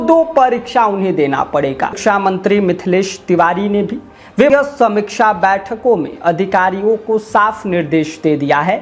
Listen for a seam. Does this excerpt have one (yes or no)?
yes